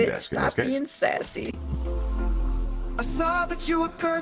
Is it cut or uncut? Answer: cut